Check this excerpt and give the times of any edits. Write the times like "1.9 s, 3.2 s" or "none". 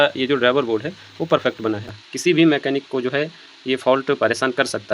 1.9 s

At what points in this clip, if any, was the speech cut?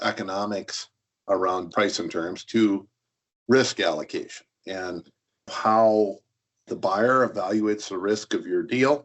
1.7 s, 5.5 s

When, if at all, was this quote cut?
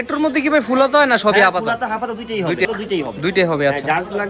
2.6 s

